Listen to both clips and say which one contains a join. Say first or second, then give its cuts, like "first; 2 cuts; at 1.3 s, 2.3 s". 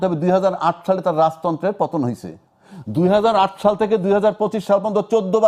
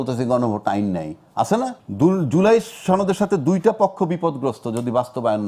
second; 1 cut; at 1.8 s